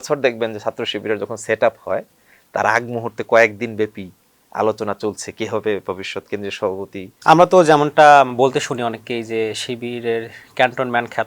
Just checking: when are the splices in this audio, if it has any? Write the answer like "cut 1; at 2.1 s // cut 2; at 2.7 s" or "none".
cut 1; at 7.1 s